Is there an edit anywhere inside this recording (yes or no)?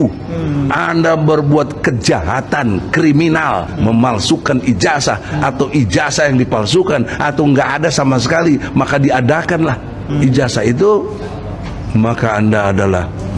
no